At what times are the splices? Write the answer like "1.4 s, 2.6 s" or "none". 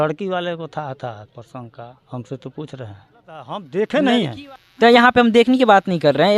3.6 s